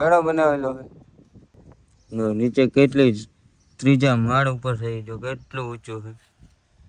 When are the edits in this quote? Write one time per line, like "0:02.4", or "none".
0:01.1